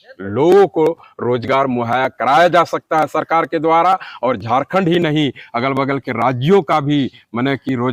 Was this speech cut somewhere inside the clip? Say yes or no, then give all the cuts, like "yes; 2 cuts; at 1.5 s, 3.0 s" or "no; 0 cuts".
no; 0 cuts